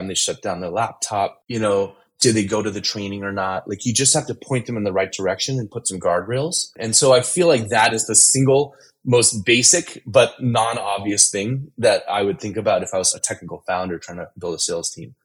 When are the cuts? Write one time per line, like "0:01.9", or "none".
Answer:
0:13.1